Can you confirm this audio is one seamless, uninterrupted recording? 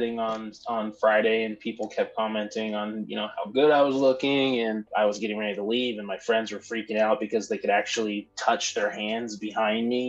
no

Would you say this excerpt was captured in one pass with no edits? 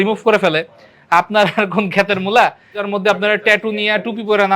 no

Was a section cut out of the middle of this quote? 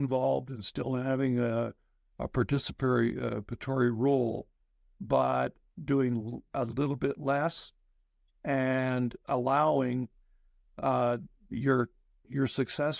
no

